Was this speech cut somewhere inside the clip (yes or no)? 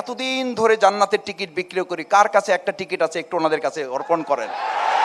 no